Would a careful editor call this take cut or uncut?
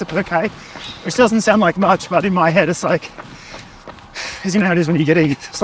uncut